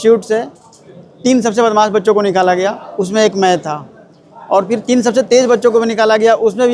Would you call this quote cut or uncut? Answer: uncut